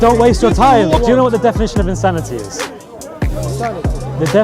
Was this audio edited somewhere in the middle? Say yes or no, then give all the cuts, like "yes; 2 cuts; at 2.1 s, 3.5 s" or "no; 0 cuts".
yes; 1 cut; at 1.0 s